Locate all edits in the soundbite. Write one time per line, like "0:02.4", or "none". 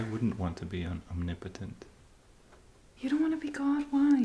none